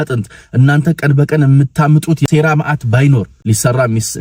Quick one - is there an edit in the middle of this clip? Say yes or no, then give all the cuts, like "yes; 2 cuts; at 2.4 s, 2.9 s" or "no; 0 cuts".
yes; 2 cuts; at 2.3 s, 3.3 s